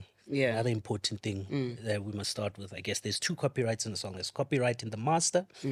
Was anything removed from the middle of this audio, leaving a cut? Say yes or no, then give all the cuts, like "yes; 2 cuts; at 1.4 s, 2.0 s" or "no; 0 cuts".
no; 0 cuts